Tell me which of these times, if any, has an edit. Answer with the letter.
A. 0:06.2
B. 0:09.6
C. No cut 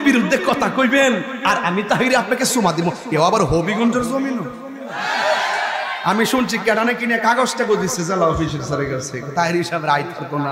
C